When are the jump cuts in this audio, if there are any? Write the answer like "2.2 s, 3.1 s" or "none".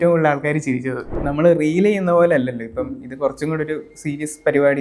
1.2 s